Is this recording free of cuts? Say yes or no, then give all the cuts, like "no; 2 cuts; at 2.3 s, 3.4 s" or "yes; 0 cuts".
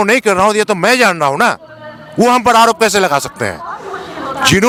yes; 0 cuts